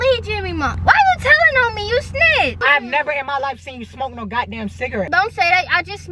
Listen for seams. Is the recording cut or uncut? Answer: cut